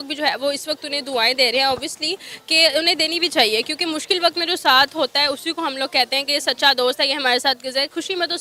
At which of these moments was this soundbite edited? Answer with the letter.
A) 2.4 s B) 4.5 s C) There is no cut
C